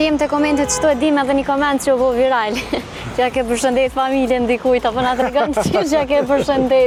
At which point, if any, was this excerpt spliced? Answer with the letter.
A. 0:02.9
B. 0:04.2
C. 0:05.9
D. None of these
D